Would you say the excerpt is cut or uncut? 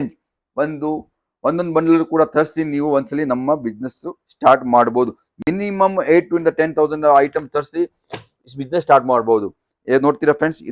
uncut